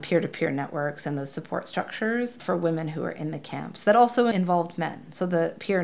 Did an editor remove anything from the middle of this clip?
no; 0 cuts

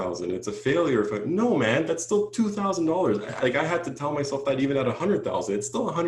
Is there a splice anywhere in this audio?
no; 0 cuts

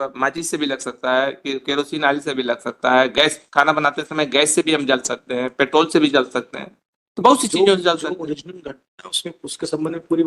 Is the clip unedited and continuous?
yes; 0 cuts

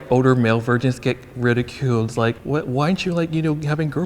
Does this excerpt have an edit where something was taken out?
yes; 1 cut; at 2.4 s

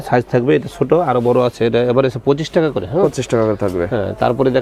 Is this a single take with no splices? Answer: yes; 0 cuts

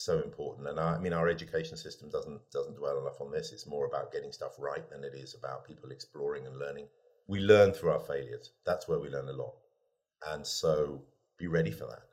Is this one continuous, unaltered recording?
yes; 0 cuts

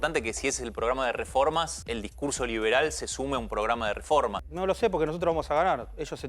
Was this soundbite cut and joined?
yes; 2 cuts; at 1.8 s, 4.4 s

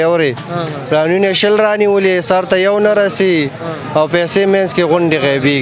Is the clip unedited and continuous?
yes; 0 cuts

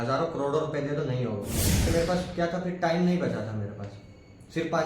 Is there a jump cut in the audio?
yes; 1 cut; at 1.9 s

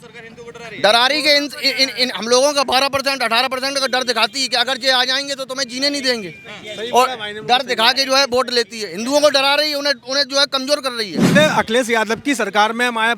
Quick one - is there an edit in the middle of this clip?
yes; 1 cut; at 11.3 s

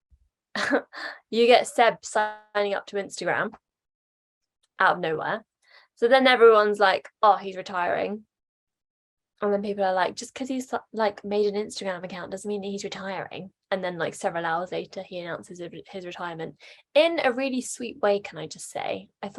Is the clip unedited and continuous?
yes; 0 cuts

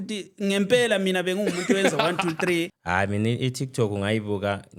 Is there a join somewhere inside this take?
yes; 1 cut; at 2.8 s

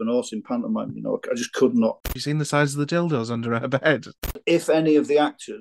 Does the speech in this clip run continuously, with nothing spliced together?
no; 2 cuts; at 2.2 s, 4.4 s

